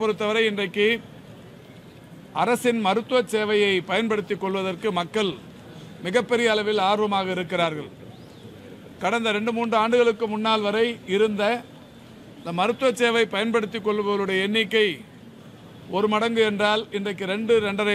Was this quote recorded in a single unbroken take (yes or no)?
yes